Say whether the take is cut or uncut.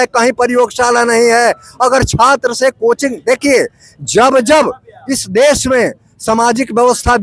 uncut